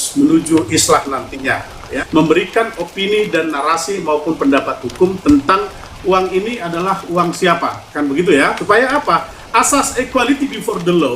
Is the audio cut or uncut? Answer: cut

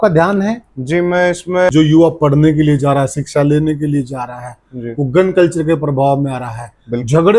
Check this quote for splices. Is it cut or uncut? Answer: cut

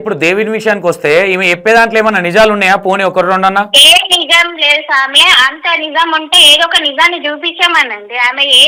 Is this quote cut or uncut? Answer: uncut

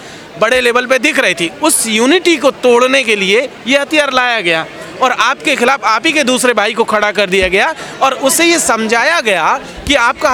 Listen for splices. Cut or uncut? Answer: uncut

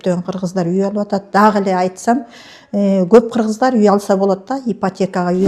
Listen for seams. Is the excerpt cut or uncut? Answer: uncut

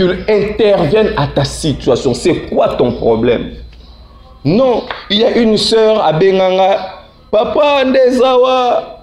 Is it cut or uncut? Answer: uncut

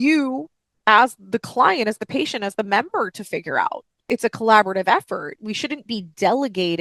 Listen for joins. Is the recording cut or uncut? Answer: cut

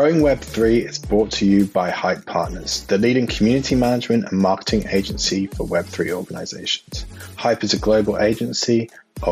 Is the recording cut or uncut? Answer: uncut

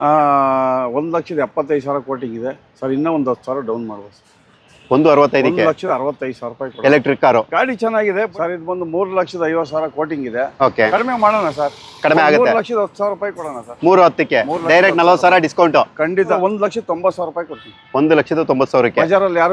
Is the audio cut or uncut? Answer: cut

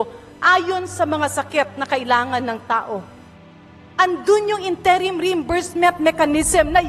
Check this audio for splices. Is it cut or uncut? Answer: uncut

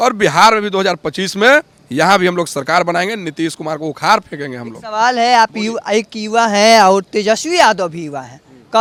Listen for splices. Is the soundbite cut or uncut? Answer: uncut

